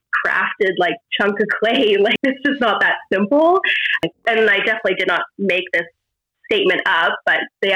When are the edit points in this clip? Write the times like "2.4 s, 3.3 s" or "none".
1.0 s, 2.2 s, 4.2 s